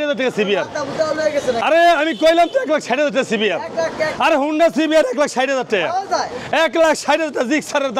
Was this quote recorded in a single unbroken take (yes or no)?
yes